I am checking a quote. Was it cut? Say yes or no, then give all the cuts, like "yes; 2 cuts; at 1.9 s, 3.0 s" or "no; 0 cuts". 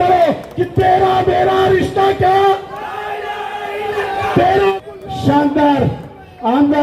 yes; 1 cut; at 4.8 s